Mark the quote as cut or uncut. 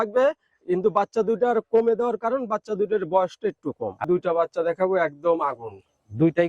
cut